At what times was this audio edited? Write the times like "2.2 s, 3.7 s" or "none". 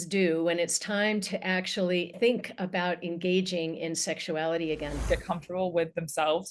2.1 s, 5.0 s